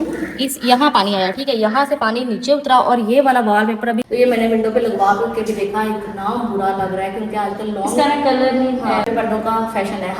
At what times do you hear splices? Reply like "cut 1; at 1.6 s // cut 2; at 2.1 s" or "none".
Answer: cut 1; at 4.1 s // cut 2; at 9.1 s

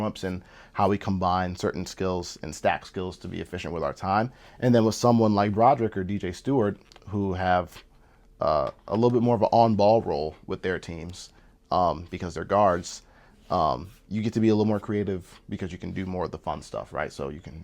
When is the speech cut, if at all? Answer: none

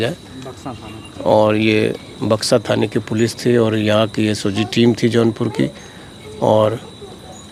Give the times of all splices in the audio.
none

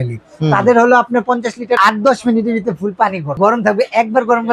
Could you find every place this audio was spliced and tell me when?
cut 1; at 1.8 s // cut 2; at 3.4 s

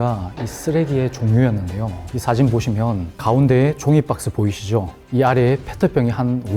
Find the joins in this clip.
cut 1; at 2.0 s

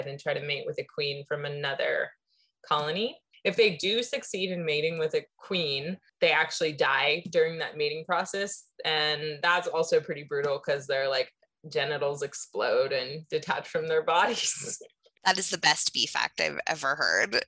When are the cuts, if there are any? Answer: cut 1; at 3.3 s

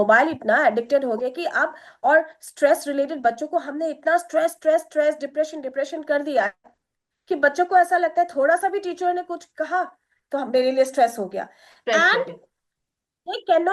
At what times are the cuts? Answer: none

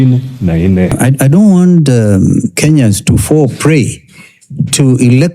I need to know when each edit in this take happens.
cut 1; at 0.9 s

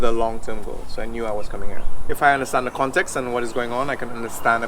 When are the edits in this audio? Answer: cut 1; at 2.1 s

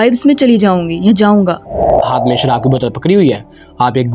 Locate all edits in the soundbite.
cut 1; at 1.9 s

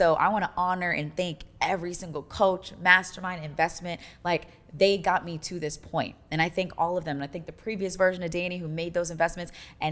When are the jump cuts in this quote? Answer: none

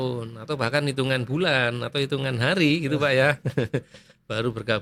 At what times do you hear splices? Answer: none

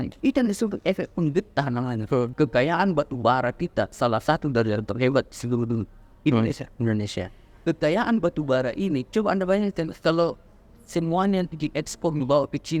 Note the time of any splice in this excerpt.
cut 1; at 2.3 s

